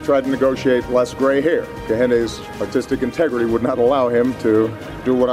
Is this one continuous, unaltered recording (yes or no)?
no